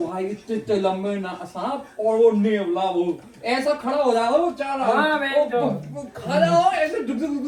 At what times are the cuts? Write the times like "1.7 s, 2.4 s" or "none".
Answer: none